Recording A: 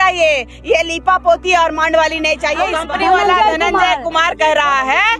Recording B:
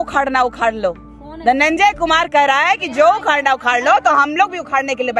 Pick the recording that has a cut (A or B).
A